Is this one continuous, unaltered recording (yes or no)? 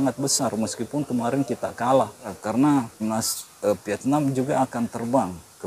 no